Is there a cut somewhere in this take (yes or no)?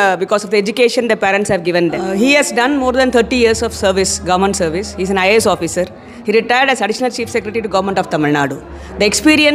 yes